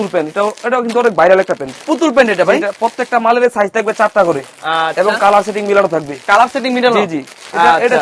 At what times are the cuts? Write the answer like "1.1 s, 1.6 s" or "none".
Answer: none